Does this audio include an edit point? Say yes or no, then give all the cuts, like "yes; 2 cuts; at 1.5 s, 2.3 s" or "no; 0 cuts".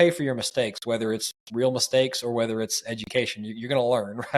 no; 0 cuts